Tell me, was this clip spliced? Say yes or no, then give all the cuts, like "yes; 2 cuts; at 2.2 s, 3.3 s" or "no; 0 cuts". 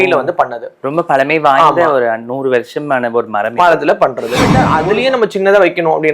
yes; 1 cut; at 4.6 s